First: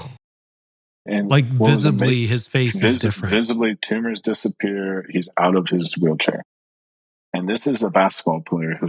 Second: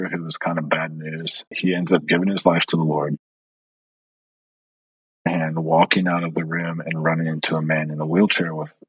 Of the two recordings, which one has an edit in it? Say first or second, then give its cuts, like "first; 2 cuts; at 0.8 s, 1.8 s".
second; 1 cut; at 1.5 s